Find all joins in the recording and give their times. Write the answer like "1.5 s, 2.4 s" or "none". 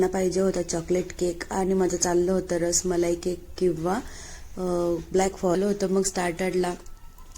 5.6 s